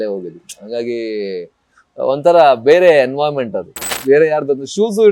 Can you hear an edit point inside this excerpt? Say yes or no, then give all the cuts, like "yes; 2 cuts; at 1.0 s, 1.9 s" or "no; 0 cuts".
yes; 1 cut; at 3.9 s